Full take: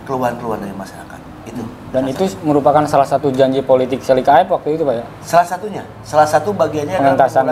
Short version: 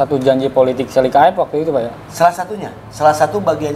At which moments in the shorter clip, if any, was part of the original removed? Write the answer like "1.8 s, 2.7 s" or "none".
none